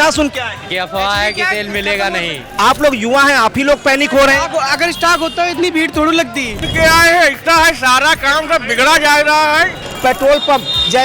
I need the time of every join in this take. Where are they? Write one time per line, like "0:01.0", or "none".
0:02.5
0:06.6
0:09.9